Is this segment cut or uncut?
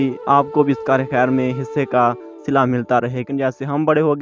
cut